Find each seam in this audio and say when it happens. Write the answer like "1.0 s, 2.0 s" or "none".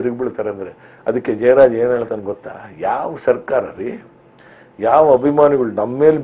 none